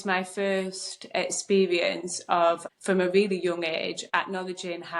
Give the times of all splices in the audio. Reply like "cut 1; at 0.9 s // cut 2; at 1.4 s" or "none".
cut 1; at 2.7 s